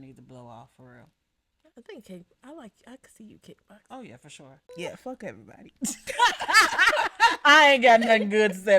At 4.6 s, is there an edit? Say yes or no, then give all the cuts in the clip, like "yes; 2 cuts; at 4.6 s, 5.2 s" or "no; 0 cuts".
yes; 1 cut; at 4.6 s